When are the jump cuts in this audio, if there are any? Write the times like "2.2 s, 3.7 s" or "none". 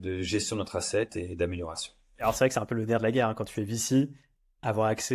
2.2 s

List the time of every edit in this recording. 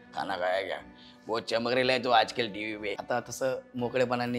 3.0 s

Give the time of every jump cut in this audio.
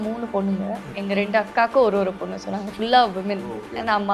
1.0 s

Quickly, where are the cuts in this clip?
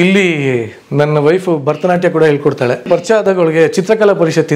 2.8 s

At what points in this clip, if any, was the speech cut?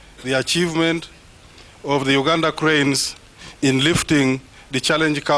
none

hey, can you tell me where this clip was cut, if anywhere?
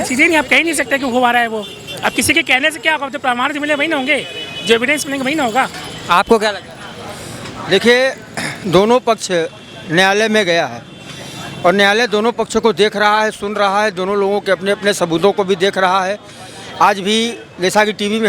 none

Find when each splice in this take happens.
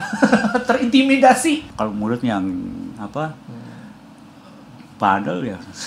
1.7 s

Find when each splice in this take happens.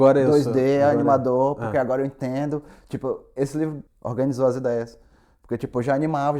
3.8 s

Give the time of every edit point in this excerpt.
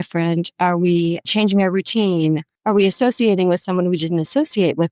2.5 s

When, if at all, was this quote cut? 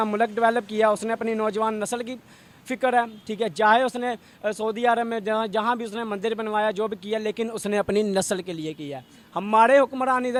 none

